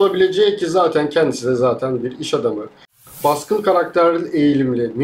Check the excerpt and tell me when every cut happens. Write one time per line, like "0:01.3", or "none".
0:02.9